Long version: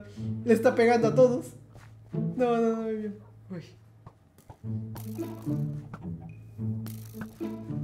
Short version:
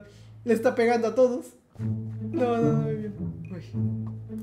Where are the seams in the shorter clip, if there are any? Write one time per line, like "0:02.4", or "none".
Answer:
0:03.2